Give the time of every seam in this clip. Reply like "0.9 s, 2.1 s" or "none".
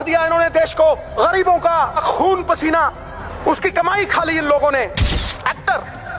1.1 s, 2.0 s, 3.2 s, 5.1 s